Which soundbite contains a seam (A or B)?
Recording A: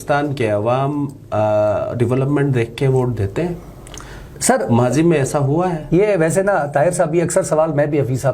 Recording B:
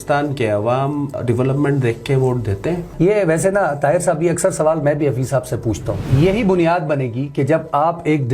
B